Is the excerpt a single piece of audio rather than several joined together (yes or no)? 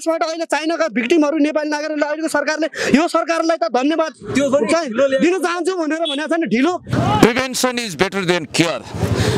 no